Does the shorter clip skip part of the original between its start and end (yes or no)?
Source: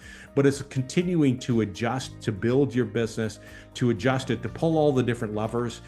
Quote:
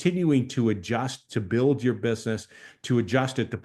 no